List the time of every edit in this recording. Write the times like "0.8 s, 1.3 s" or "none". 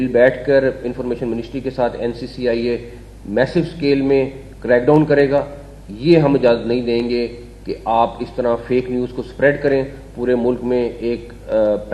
none